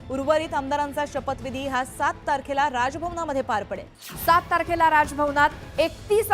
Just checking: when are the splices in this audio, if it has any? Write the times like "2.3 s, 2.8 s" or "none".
4.0 s